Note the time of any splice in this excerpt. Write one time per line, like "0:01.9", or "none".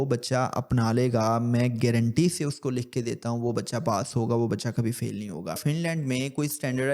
0:05.6